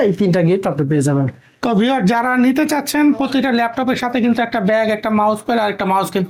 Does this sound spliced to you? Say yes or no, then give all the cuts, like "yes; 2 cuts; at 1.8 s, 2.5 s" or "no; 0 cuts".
no; 0 cuts